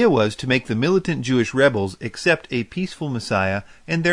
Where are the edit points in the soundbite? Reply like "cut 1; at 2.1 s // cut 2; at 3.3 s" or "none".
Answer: cut 1; at 1.9 s